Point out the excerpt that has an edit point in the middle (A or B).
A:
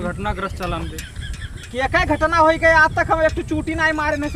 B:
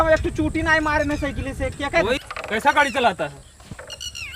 B